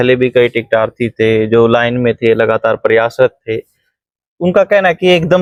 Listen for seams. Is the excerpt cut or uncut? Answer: uncut